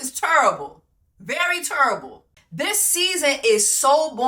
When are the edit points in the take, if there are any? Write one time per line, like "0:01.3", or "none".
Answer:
0:02.2